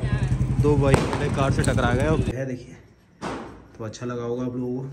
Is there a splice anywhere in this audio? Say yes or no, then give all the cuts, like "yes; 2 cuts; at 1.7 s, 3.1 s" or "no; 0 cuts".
yes; 1 cut; at 2.3 s